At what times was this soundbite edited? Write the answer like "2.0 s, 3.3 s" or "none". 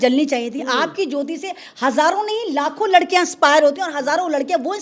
none